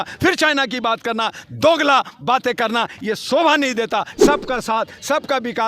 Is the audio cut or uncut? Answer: cut